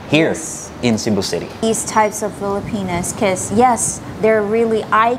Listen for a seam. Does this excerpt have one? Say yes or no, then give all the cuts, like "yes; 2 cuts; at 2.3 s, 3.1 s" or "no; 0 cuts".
yes; 1 cut; at 1.6 s